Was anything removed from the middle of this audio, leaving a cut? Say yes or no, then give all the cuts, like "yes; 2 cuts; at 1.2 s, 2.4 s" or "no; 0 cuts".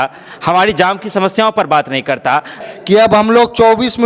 yes; 1 cut; at 2.7 s